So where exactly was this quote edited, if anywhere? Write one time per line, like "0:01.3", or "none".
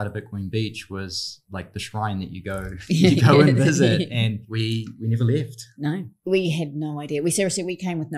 0:01.4
0:04.5
0:06.3